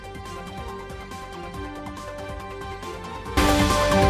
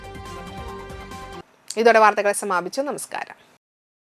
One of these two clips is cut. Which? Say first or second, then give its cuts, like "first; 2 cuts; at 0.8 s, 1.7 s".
first; 1 cut; at 1.3 s